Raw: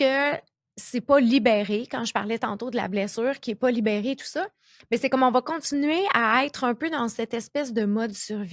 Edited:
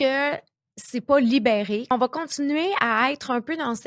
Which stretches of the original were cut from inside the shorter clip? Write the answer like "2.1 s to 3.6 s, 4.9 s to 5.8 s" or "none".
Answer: 1.9 s to 5.2 s